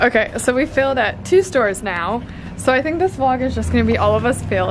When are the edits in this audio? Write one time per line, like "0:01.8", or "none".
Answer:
none

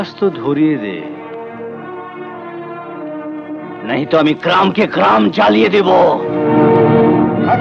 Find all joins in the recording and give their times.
none

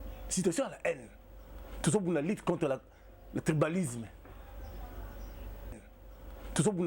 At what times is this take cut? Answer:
0:05.9

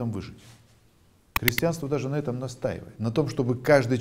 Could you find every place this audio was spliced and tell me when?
0:01.3
0:02.9

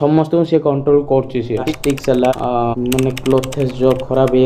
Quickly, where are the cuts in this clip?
0:01.7

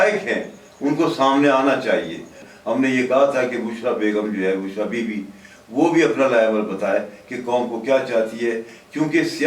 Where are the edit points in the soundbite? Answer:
0:02.4

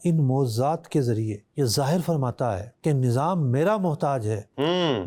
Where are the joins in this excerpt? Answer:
none

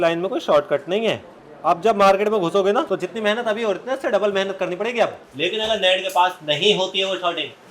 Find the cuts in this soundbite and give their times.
0:05.2

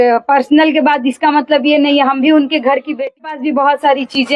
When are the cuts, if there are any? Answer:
0:03.2

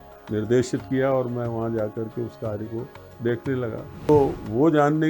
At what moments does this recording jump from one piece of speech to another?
0:04.1

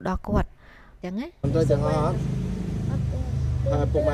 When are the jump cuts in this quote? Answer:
0:01.0

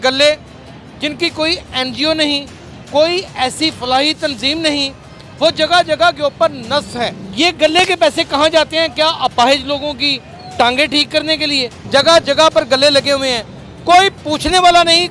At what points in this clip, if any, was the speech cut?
0:07.2
0:11.7

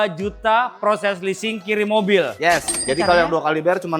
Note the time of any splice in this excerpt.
0:02.7

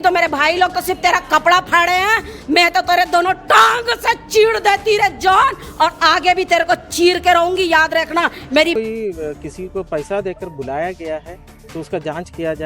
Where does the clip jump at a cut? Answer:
0:08.7

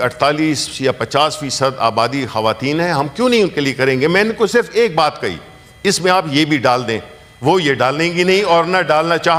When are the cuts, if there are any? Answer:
none

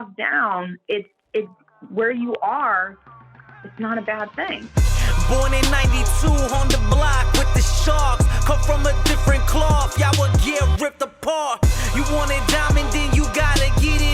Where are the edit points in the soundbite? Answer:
0:04.6

